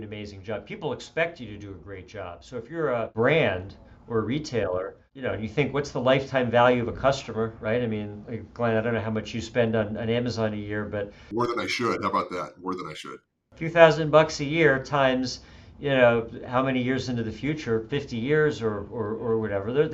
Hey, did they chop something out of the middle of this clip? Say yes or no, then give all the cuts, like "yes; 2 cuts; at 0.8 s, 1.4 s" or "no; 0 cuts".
yes; 4 cuts; at 3.1 s, 5.0 s, 11.2 s, 13.1 s